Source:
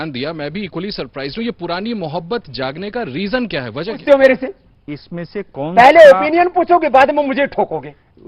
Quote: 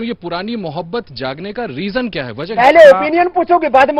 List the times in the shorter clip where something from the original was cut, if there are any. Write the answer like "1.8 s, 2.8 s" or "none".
2.5 s